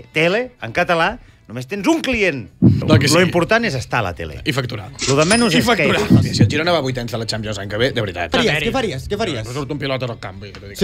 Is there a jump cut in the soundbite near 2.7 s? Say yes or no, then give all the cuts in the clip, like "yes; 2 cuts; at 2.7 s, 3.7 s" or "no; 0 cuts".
yes; 3 cuts; at 2.7 s, 6.2 s, 8.3 s